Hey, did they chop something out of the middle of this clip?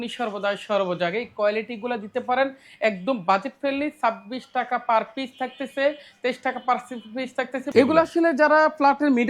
yes; 1 cut; at 7.7 s

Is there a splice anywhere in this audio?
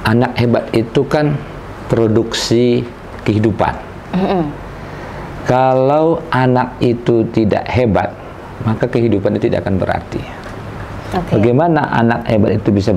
no; 0 cuts

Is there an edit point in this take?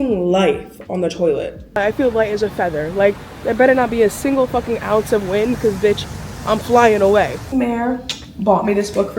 yes; 2 cuts; at 1.8 s, 7.4 s

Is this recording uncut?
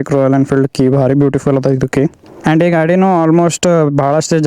no; 1 cut; at 2.4 s

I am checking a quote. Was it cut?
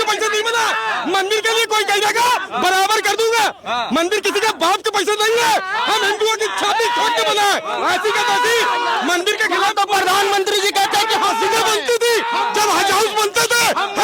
no; 0 cuts

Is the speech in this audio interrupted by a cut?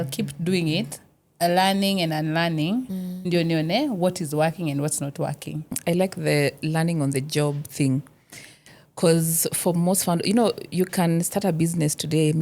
yes; 1 cut; at 5.8 s

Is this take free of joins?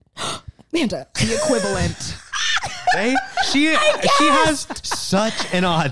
yes; 0 cuts

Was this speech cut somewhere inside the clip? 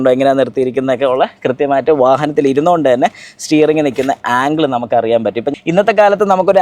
yes; 1 cut; at 5.5 s

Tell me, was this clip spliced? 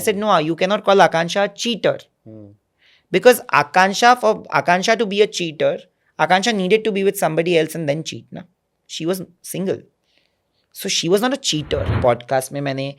yes; 1 cut; at 11.9 s

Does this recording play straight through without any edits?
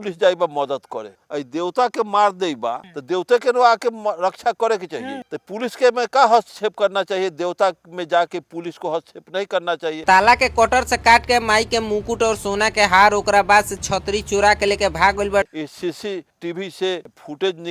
no; 2 cuts; at 10.0 s, 15.5 s

